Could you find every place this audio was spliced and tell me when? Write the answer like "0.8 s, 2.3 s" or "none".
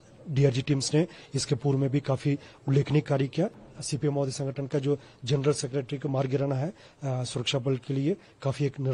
3.6 s